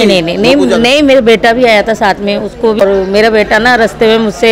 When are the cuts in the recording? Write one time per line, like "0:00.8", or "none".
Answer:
0:02.8